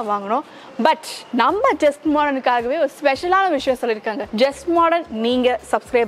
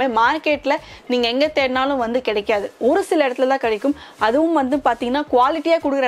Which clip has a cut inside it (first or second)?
first